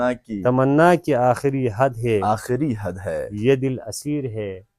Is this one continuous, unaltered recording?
yes; 0 cuts

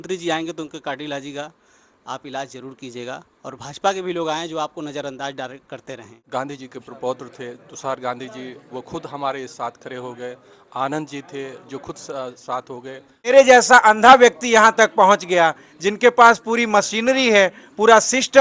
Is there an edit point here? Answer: yes; 2 cuts; at 6.2 s, 13.3 s

